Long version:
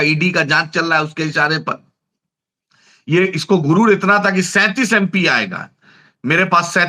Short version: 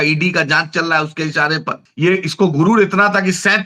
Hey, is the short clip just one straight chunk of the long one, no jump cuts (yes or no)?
no